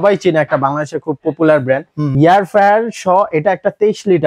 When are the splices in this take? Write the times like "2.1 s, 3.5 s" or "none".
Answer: 2.1 s